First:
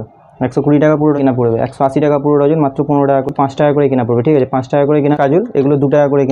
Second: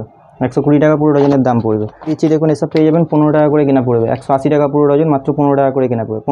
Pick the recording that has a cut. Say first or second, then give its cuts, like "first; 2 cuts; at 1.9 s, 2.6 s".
first; 3 cuts; at 1.2 s, 3.3 s, 5.2 s